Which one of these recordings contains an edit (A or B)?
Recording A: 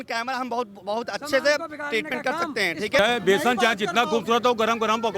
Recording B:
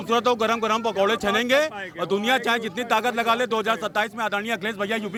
A